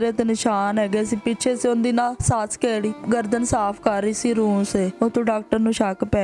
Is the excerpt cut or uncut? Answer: cut